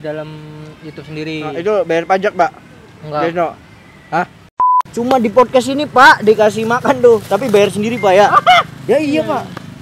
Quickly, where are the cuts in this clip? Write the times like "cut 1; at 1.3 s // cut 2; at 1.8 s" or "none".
cut 1; at 4.9 s